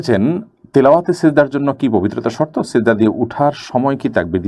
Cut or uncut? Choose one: uncut